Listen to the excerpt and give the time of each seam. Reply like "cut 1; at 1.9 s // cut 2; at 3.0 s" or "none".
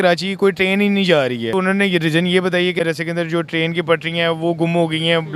cut 1; at 1.5 s // cut 2; at 2.8 s